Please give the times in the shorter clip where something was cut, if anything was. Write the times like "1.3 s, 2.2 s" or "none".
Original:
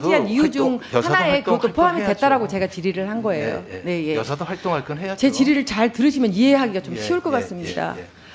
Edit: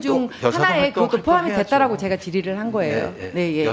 none